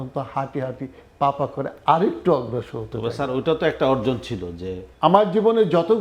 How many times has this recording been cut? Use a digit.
1